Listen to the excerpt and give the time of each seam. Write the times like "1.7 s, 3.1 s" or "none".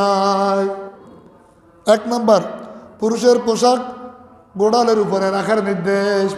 0.9 s